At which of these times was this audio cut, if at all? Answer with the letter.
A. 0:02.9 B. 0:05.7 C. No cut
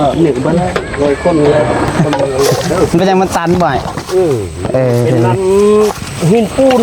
A